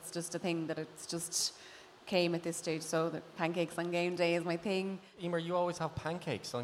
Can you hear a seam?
yes; 1 cut; at 5.1 s

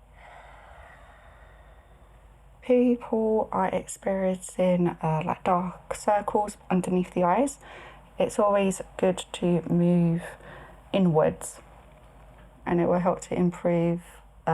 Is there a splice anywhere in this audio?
yes; 3 cuts; at 2.6 s, 6.5 s, 12.5 s

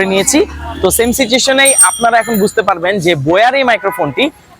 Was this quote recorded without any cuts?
yes; 0 cuts

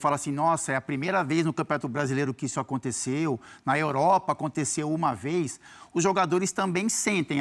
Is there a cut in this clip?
no; 0 cuts

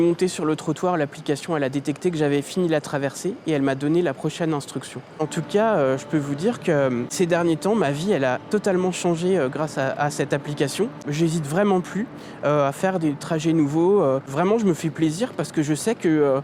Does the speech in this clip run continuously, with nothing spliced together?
no; 4 cuts; at 5.2 s, 7.1 s, 11.0 s, 14.3 s

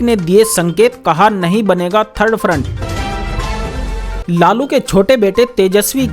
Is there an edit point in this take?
yes; 2 cuts; at 2.7 s, 4.2 s

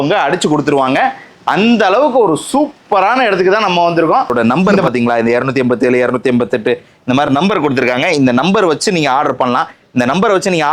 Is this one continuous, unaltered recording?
no; 1 cut; at 4.3 s

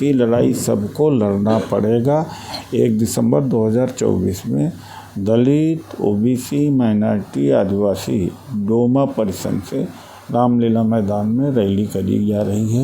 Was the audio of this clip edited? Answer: no; 0 cuts

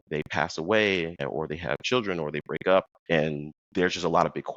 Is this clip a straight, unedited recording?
no; 2 cuts; at 1.2 s, 3.2 s

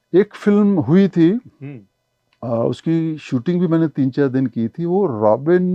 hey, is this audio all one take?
yes; 0 cuts

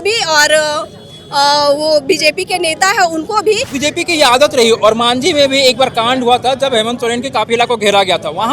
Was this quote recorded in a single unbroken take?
no; 1 cut; at 3.7 s

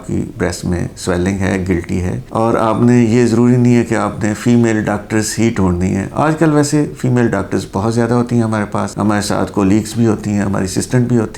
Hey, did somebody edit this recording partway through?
yes; 1 cut; at 2.2 s

